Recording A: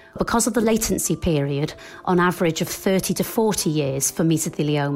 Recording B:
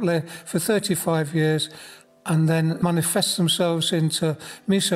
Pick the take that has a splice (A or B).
B